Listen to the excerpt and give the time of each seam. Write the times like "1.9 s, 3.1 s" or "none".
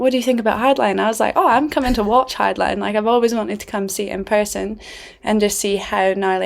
none